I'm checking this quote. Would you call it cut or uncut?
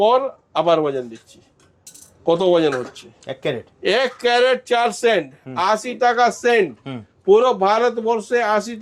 uncut